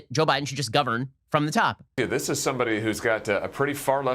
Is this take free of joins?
no; 1 cut; at 1.9 s

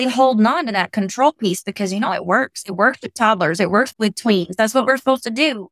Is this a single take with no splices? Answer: no; 1 cut; at 4.5 s

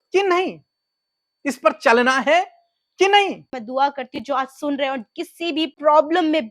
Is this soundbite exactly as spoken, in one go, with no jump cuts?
no; 1 cut; at 3.5 s

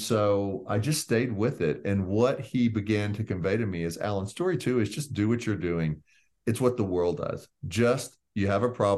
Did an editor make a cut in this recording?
no; 0 cuts

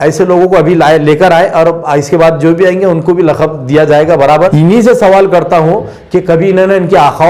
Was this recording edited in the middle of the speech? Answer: yes; 1 cut; at 4.5 s

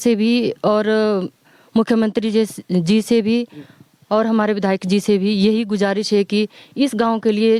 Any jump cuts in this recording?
no; 0 cuts

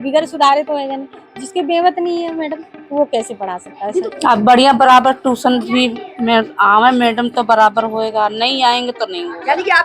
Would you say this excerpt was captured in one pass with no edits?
no; 1 cut; at 4.1 s

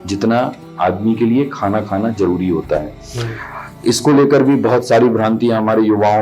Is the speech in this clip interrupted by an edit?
no; 0 cuts

